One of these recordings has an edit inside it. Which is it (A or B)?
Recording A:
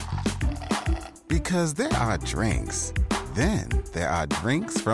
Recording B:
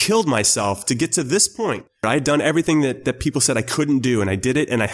B